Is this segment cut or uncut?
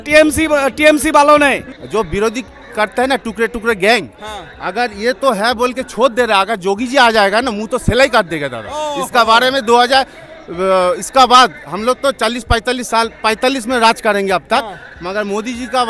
cut